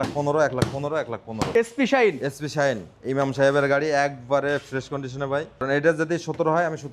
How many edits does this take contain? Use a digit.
2